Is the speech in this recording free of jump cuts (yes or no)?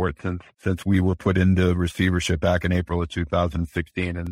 yes